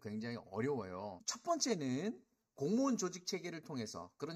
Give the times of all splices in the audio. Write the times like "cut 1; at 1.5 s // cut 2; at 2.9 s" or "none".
cut 1; at 1.2 s